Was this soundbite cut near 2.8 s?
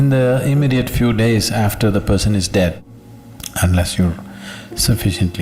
yes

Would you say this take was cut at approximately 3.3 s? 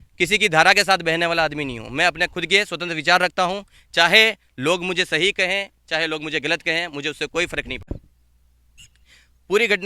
no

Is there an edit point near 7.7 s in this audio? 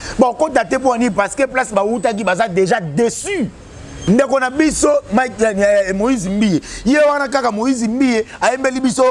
no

